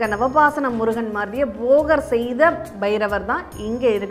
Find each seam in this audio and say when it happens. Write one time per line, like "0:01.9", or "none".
none